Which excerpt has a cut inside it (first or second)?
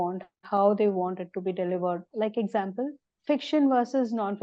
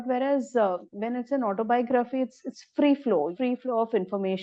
first